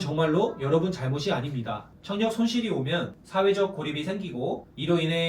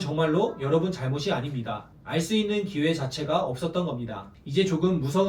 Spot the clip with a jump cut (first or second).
first